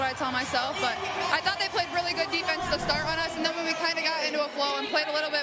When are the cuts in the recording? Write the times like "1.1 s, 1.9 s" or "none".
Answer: none